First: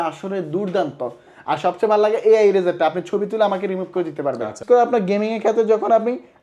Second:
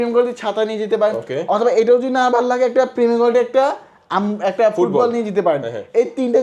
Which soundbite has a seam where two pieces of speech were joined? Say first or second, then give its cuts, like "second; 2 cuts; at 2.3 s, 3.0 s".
first; 1 cut; at 4.6 s